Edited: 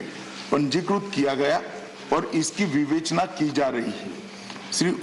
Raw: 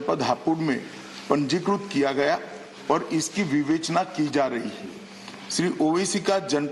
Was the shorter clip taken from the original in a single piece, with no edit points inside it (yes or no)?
yes